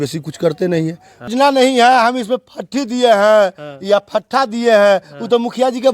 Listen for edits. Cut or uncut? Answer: cut